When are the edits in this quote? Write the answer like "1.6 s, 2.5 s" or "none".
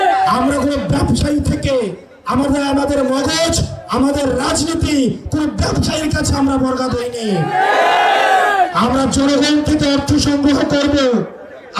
none